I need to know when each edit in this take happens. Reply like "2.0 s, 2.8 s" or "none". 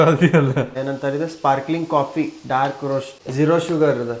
0.8 s, 3.2 s